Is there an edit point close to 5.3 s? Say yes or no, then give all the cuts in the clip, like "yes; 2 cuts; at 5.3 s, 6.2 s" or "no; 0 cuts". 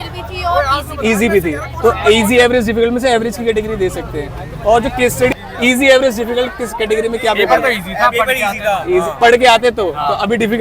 yes; 1 cut; at 5.3 s